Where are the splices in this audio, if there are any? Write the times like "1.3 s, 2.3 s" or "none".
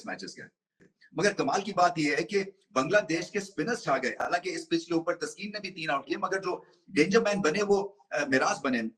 none